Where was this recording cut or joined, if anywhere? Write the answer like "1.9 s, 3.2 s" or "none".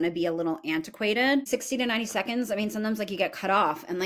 none